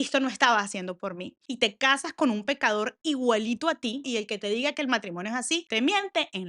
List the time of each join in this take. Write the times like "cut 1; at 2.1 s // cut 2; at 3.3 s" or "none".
cut 1; at 1.4 s // cut 2; at 4.1 s